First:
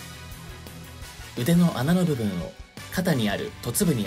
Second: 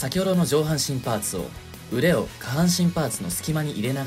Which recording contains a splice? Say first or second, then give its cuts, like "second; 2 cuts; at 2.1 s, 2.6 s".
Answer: first; 1 cut; at 1.3 s